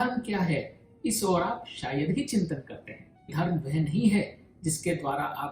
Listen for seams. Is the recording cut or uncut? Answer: cut